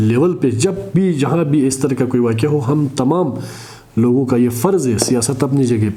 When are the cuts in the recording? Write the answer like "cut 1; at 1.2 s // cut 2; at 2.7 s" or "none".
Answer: none